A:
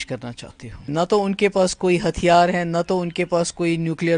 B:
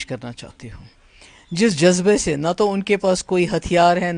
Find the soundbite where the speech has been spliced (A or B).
A